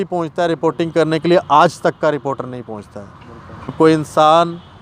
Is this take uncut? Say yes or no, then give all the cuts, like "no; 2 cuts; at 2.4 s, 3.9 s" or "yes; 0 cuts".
no; 1 cut; at 3.7 s